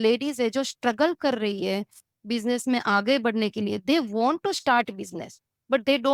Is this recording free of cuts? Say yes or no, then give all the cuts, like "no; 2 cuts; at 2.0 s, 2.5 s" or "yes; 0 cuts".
yes; 0 cuts